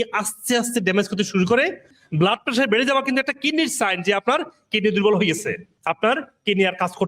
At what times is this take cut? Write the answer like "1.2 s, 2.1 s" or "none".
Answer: 1.9 s, 5.7 s